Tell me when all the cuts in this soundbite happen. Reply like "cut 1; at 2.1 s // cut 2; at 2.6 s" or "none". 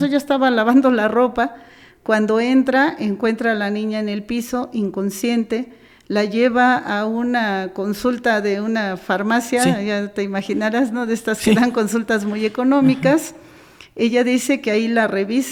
none